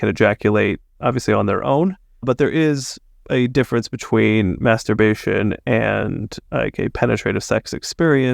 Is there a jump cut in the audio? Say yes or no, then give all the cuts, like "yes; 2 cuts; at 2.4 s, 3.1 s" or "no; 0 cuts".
yes; 1 cut; at 2.3 s